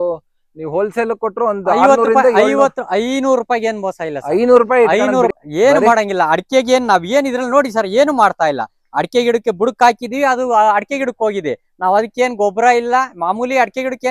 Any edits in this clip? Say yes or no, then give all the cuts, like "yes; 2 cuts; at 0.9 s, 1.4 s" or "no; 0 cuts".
yes; 1 cut; at 5.3 s